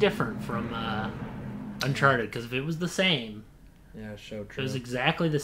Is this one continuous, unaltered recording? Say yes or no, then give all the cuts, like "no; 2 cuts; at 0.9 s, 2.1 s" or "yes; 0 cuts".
yes; 0 cuts